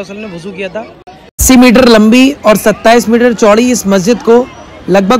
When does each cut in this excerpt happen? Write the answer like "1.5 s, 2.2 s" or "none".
1.3 s